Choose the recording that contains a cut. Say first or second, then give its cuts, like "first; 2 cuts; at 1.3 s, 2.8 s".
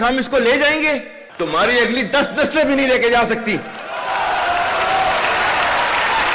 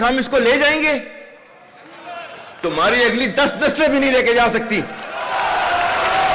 first; 1 cut; at 1.2 s